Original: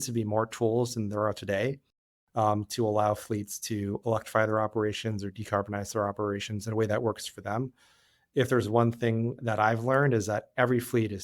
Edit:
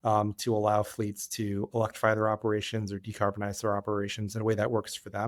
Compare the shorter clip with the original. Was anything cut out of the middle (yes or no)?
no